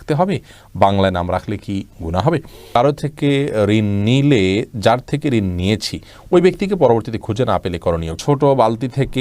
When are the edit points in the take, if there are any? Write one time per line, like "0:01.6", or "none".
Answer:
0:02.8
0:08.2